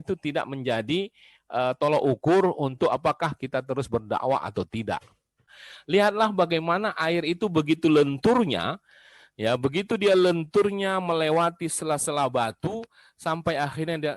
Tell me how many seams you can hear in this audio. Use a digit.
1